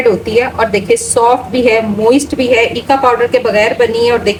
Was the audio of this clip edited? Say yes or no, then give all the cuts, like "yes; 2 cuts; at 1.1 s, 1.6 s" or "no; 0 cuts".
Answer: no; 0 cuts